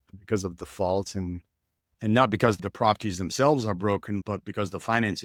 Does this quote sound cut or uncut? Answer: uncut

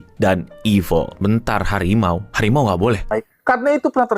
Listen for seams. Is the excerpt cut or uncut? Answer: cut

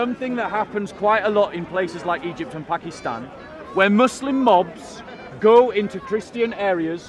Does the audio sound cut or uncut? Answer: uncut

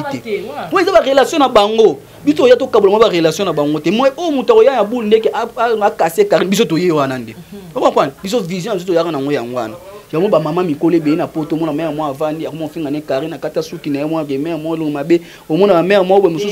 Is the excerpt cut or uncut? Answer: uncut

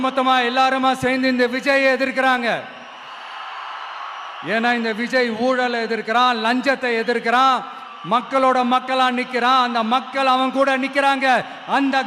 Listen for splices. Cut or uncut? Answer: uncut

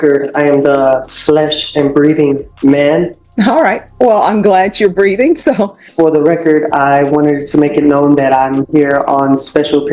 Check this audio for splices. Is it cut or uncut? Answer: cut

